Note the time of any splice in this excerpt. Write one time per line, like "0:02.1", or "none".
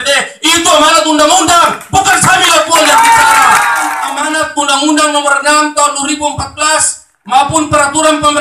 0:04.0